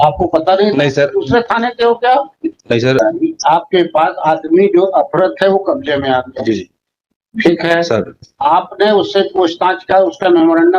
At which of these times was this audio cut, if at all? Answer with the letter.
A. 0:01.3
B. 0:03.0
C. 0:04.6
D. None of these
B